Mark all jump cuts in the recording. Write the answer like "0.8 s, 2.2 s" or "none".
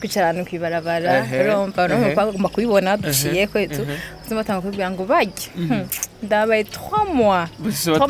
none